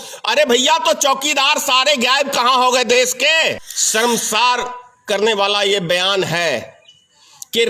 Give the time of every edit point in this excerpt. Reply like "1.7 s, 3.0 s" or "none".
3.7 s